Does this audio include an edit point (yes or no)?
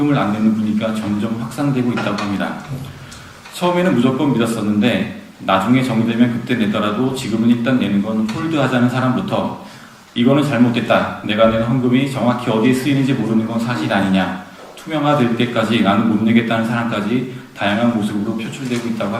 no